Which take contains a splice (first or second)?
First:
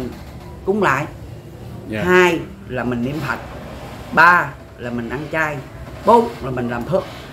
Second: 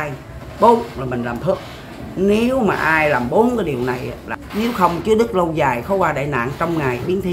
second